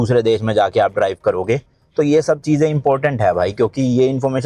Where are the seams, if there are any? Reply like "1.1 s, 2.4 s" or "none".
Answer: none